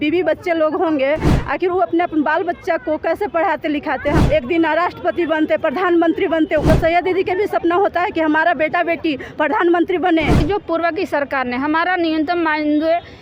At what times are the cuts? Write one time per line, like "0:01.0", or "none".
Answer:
0:04.2
0:06.7
0:10.4